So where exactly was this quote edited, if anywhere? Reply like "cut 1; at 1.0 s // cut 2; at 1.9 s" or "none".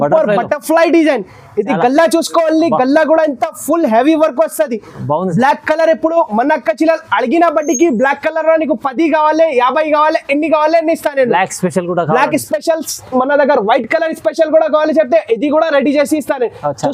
none